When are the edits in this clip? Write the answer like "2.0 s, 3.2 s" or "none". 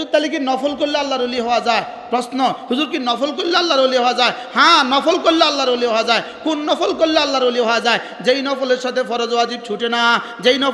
none